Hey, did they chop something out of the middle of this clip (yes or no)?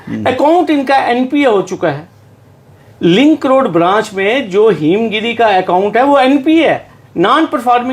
no